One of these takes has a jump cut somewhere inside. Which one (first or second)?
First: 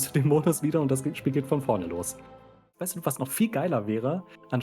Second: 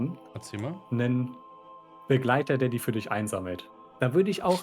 first